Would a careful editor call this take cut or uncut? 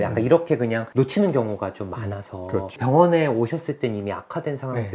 uncut